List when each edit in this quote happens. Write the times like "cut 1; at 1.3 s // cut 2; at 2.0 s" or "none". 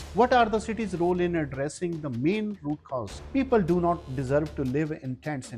cut 1; at 3.2 s

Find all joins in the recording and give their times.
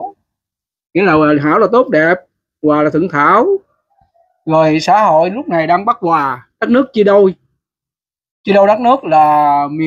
none

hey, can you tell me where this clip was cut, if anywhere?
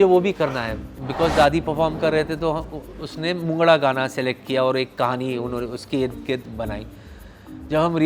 cut 1; at 0.9 s

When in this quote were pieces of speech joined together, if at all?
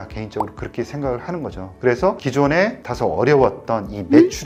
none

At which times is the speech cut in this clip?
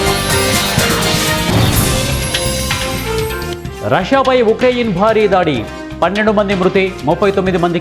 cut 1; at 3.5 s

